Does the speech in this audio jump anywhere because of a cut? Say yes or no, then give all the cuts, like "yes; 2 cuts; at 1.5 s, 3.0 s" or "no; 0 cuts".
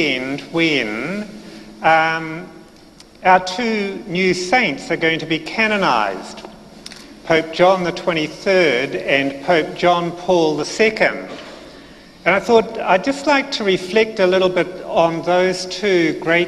yes; 1 cut; at 5.5 s